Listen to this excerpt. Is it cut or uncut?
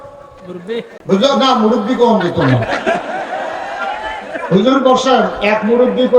cut